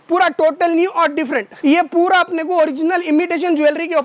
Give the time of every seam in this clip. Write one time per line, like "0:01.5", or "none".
0:01.5